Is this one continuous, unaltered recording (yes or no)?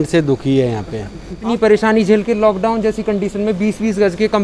no